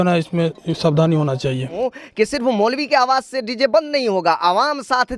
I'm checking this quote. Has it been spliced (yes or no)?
yes